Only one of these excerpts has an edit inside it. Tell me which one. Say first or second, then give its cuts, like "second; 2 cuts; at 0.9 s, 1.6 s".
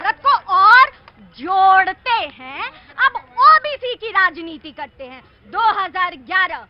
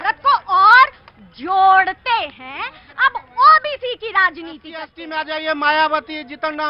second; 1 cut; at 5.0 s